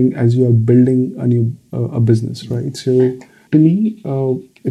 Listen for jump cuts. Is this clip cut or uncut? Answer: cut